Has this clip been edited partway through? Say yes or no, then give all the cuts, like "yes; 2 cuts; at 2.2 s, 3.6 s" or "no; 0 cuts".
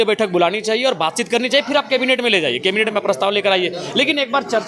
no; 0 cuts